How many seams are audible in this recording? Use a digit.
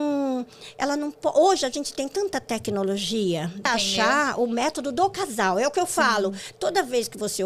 1